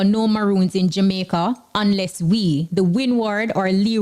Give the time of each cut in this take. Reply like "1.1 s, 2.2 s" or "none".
none